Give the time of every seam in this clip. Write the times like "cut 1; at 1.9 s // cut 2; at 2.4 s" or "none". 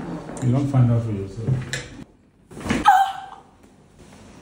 cut 1; at 1.9 s

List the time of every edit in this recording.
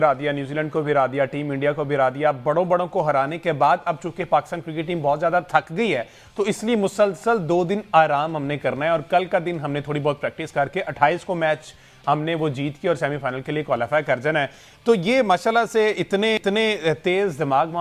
none

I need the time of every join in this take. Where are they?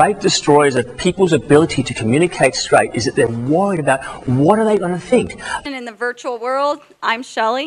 none

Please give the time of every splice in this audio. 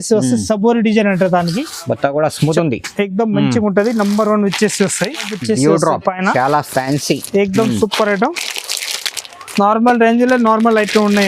cut 1; at 5.4 s

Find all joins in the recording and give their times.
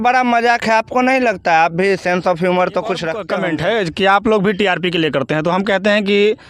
cut 1; at 3.2 s

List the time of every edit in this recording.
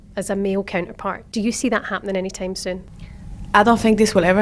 cut 1; at 1.1 s // cut 2; at 3.1 s

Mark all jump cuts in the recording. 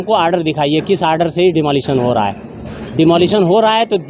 none

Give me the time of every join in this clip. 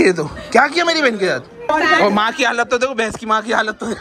cut 1; at 1.7 s

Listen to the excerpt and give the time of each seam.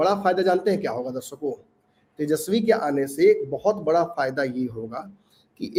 none

